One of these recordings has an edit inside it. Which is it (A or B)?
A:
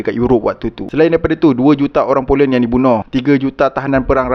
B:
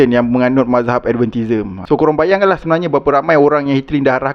A